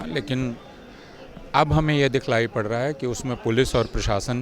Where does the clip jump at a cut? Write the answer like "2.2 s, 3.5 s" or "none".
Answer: none